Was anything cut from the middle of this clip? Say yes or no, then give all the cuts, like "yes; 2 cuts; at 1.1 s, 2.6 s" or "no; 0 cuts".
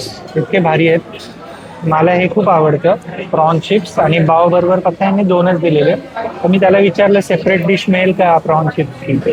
no; 0 cuts